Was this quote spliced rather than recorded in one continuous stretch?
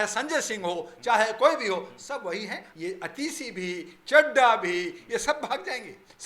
yes; 1 cut; at 2.6 s

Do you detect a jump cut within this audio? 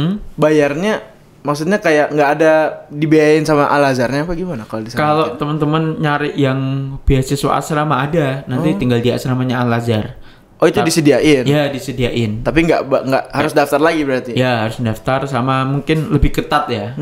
no; 0 cuts

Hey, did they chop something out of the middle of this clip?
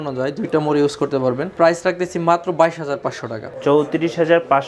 yes; 2 cuts; at 1.5 s, 3.5 s

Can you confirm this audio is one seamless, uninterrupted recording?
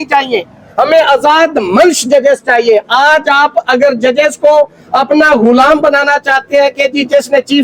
yes; 0 cuts

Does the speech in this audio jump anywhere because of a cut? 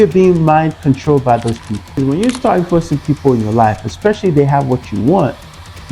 yes; 1 cut; at 2.0 s

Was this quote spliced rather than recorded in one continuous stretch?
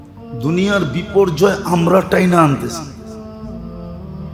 yes; 1 cut; at 2.9 s

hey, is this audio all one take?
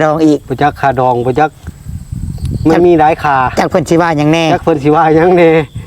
yes; 0 cuts

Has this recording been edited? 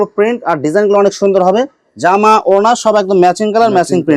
no; 0 cuts

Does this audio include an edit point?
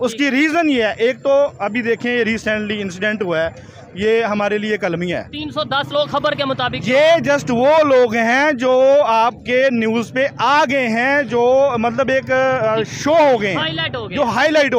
no; 0 cuts

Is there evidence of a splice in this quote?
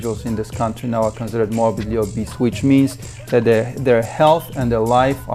no; 0 cuts

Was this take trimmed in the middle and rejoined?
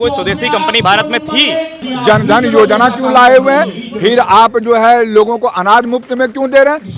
yes; 1 cut; at 1.8 s

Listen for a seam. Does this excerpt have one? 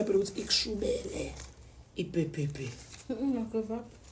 no; 0 cuts

